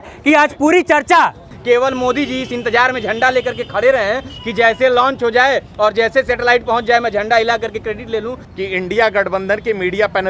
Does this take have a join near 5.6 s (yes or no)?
no